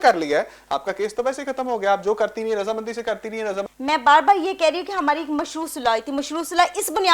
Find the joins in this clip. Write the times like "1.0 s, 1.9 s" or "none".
3.7 s